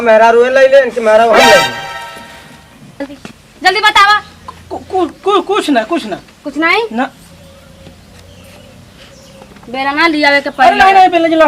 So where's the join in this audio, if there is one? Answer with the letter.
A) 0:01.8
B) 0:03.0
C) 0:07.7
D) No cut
B